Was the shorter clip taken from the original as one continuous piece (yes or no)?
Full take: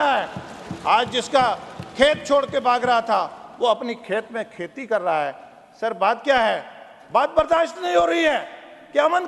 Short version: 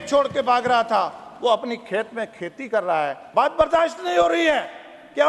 no